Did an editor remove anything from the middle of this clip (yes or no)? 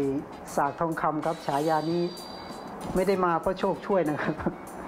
no